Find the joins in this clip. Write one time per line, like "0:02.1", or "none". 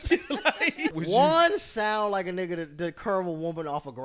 0:00.9